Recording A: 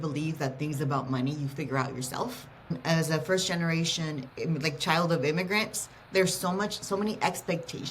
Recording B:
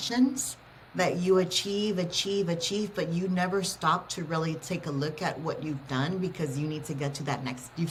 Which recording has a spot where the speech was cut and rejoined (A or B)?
A